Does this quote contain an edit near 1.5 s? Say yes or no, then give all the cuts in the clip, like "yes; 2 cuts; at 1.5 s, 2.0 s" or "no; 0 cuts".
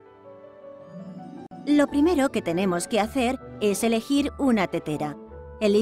yes; 1 cut; at 1.5 s